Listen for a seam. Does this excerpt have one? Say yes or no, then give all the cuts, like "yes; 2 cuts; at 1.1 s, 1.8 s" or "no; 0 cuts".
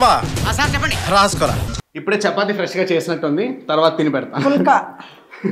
yes; 1 cut; at 1.7 s